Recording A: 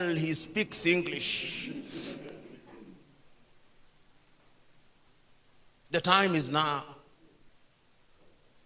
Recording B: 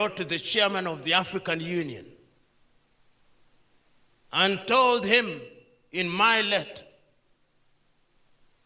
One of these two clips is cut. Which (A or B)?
A